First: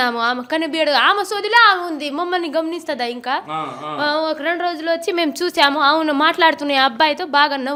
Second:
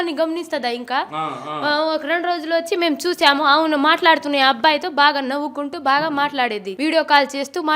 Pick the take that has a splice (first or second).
second